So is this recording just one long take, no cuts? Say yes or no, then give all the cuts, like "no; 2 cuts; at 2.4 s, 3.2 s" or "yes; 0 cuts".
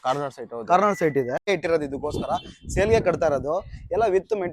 no; 1 cut; at 1.5 s